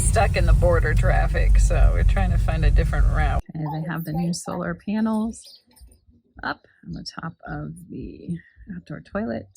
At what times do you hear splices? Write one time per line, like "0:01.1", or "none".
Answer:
0:03.4